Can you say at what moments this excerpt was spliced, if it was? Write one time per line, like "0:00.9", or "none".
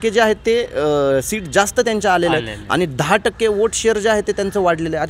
none